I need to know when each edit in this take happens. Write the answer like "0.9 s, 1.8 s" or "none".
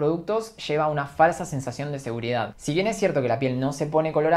2.6 s